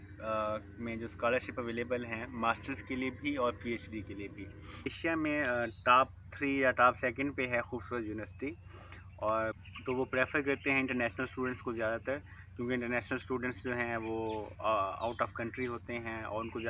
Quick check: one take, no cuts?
no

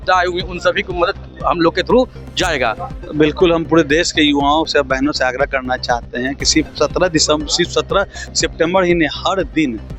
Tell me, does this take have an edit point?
yes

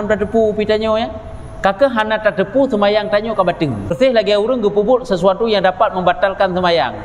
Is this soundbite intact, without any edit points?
no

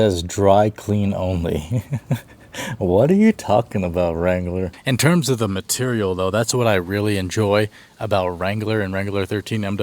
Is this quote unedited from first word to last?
no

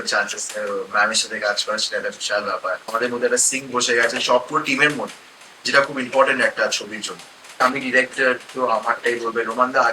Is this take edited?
yes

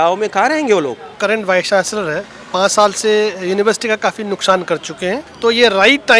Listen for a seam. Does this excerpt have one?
yes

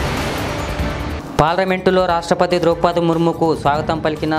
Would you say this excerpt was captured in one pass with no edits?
yes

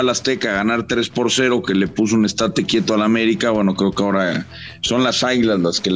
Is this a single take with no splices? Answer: yes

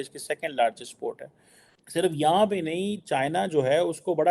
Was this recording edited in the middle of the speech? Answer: yes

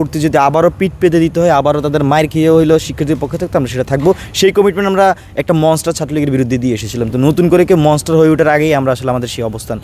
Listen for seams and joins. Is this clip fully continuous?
yes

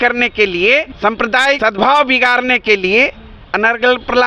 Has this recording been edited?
no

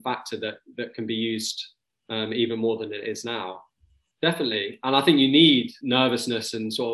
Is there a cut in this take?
yes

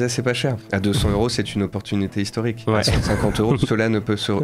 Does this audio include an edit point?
no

